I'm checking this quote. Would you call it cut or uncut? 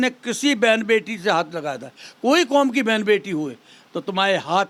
uncut